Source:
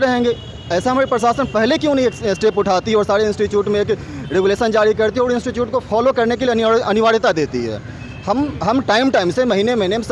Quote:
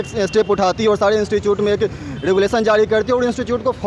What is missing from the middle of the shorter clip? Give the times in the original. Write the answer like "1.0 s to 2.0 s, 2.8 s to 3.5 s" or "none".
none

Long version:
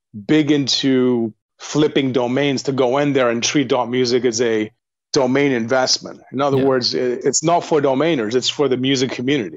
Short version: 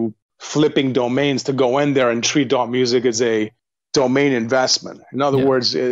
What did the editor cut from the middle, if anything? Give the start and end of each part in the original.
none

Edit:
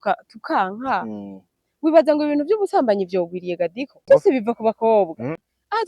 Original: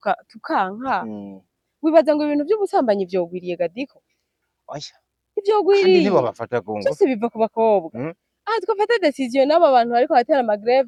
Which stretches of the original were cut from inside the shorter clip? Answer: 4.0 s to 6.8 s

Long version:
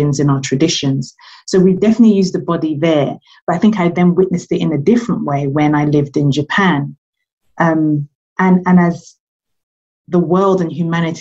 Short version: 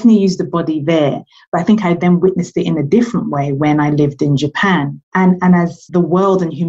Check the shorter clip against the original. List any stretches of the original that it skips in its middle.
6.9 s to 8.2 s, 9.0 s to 10.0 s

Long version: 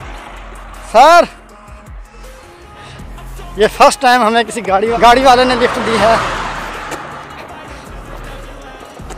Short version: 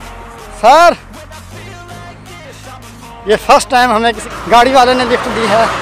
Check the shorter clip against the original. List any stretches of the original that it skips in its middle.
4.7 s to 4.9 s

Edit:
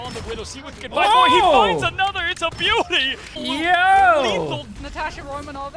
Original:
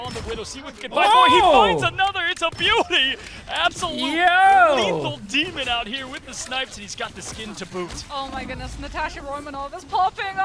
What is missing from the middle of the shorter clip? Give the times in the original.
3.4 s to 3.9 s, 5.2 s to 8.7 s

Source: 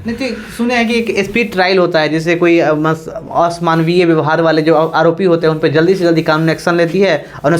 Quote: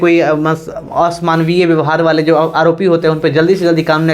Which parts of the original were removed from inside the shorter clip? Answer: none

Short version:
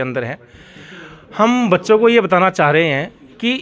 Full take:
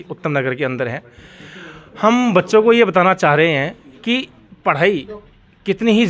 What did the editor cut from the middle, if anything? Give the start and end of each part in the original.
none

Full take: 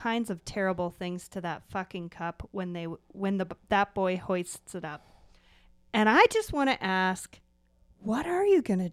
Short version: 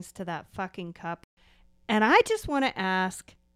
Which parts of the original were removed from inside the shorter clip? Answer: 2.4 s to 5.3 s

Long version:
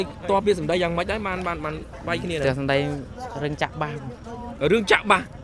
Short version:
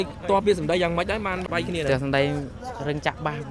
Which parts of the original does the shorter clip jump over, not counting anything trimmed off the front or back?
1.4 s to 2.0 s

